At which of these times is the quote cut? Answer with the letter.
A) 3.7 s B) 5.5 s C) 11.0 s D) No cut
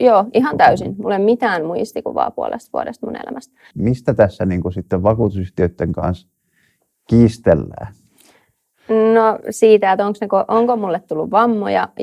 A